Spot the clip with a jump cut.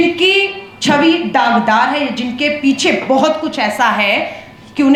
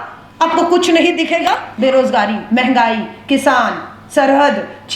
second; 1 cut; at 1.7 s

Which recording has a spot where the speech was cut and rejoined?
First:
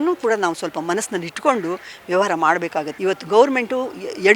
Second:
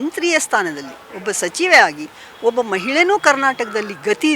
first; 1 cut; at 2.9 s

